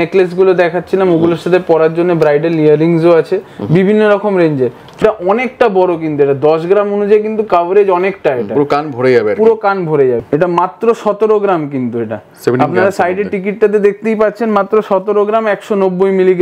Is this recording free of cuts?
no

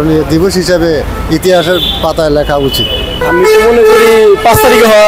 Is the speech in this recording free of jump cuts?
yes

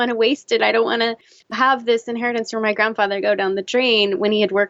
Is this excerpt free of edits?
no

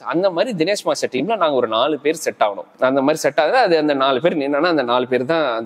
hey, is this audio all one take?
yes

